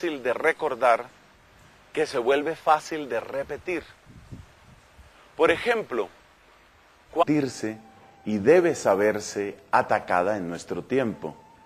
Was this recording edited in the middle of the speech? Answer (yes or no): no